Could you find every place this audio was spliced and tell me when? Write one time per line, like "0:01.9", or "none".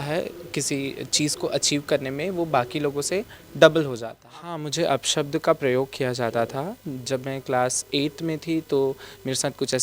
0:04.2